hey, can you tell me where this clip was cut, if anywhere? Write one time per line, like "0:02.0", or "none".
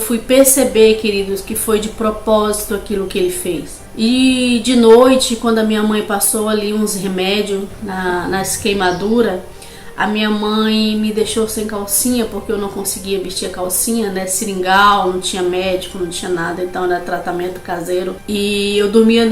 0:03.8